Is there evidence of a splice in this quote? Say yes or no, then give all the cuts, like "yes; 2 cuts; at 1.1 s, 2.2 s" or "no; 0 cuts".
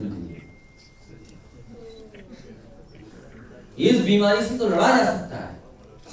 no; 0 cuts